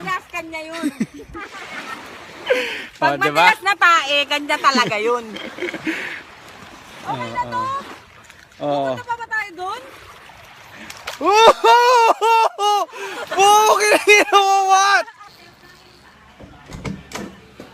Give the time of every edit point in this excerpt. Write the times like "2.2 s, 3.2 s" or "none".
13.3 s